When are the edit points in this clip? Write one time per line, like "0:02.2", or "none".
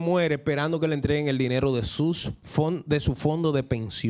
0:02.3